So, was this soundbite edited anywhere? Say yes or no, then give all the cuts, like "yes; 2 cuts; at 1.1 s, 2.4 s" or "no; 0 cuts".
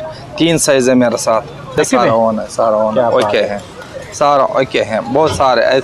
yes; 1 cut; at 1.8 s